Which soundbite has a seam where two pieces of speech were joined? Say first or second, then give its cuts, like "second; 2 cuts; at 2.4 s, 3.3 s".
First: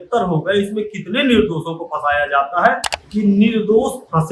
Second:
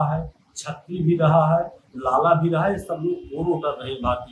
first; 1 cut; at 2.9 s